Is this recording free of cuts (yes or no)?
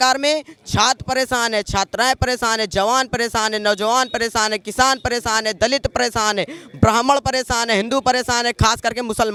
yes